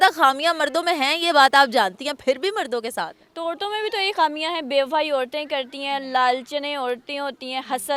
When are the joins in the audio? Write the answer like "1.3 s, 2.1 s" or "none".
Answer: none